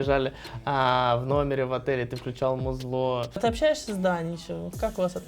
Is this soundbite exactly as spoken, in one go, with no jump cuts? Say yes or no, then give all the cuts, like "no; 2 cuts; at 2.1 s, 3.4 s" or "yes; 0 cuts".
no; 1 cut; at 3.4 s